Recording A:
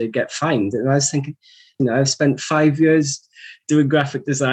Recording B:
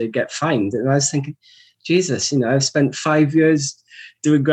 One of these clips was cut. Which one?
A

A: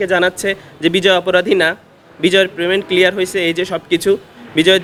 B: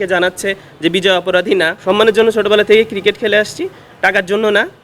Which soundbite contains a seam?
B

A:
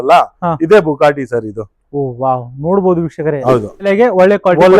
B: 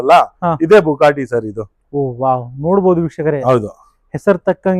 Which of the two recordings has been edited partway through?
A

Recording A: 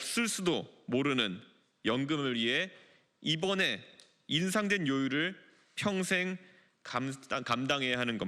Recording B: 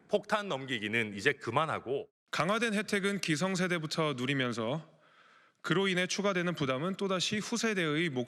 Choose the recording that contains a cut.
B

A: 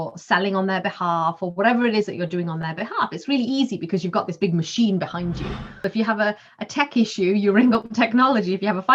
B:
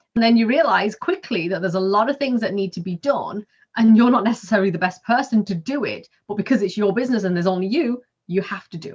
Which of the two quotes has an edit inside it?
A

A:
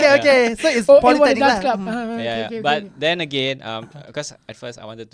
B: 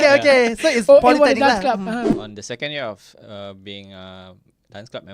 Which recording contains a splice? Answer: B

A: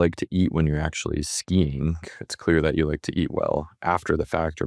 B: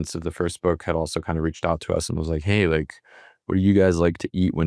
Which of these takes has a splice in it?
A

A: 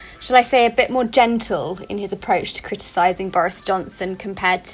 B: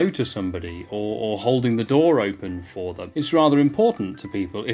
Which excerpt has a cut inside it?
B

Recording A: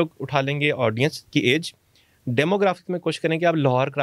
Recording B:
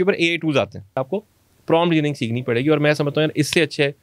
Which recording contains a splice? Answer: B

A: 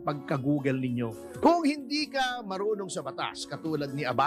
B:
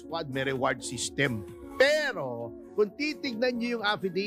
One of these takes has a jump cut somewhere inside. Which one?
A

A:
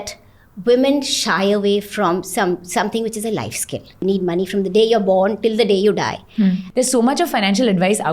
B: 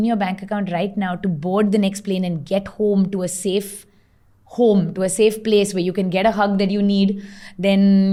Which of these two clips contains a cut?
A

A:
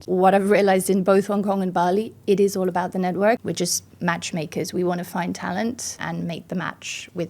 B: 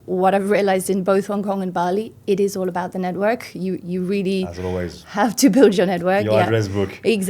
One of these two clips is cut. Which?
A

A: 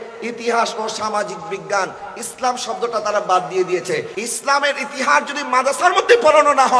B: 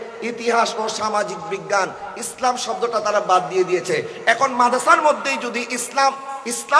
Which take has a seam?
A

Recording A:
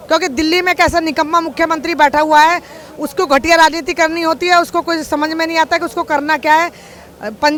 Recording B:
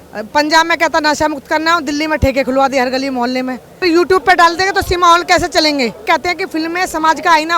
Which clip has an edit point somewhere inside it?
B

